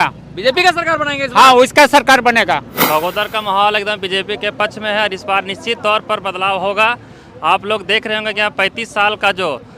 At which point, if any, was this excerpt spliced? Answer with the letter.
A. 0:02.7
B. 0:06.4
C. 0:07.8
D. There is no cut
A